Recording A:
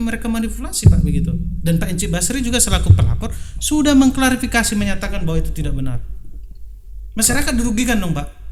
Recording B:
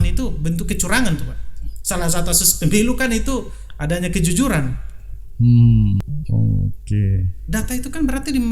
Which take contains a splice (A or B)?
B